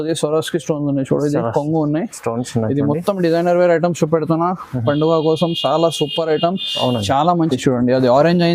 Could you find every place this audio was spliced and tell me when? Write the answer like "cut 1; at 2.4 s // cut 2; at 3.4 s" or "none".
cut 1; at 7.5 s

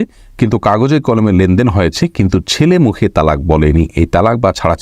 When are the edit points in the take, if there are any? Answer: none

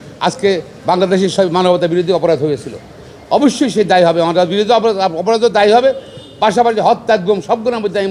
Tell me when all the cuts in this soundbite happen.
none

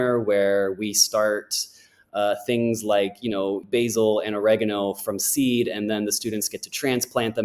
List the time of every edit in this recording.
cut 1; at 3.6 s

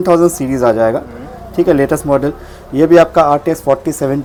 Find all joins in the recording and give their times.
none

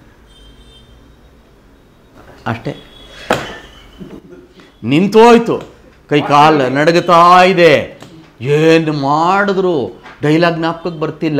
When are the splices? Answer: none

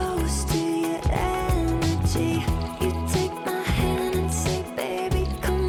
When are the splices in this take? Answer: none

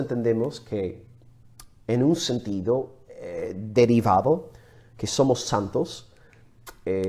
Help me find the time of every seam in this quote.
cut 1; at 3.5 s

